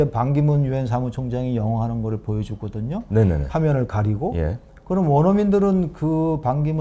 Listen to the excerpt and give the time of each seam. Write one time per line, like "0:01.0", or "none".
none